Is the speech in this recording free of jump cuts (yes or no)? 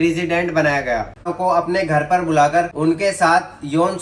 no